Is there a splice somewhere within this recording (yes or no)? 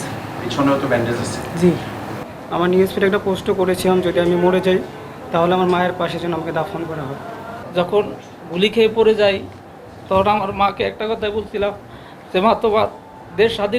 yes